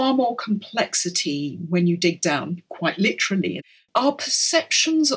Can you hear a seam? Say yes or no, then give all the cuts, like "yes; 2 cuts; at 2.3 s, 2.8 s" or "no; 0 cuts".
yes; 1 cut; at 3.6 s